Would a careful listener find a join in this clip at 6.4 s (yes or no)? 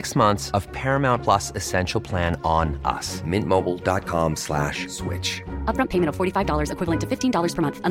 no